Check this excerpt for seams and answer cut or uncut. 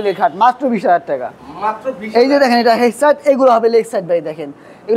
uncut